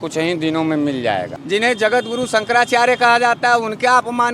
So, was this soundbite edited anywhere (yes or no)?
yes